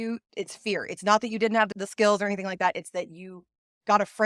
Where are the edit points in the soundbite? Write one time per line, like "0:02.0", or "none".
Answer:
none

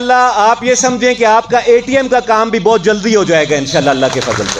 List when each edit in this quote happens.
none

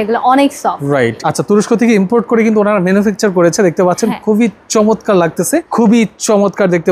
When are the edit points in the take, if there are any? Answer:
0:01.2
0:05.7

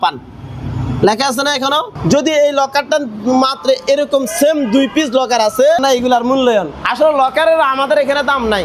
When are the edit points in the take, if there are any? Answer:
0:01.9
0:05.8

